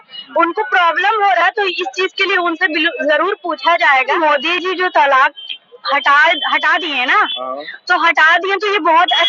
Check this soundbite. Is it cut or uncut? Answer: cut